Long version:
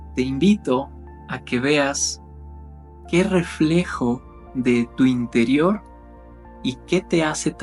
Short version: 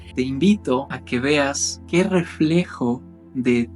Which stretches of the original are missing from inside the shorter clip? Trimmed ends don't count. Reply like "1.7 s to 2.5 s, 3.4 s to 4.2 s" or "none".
1.0 s to 1.4 s, 2.1 s to 2.9 s